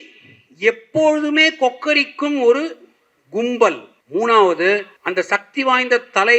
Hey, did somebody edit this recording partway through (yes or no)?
yes